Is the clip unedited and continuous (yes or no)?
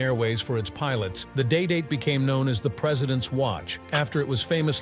no